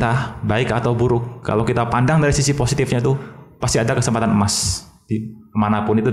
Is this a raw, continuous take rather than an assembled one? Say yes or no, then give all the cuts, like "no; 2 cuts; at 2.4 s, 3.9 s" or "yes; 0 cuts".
yes; 0 cuts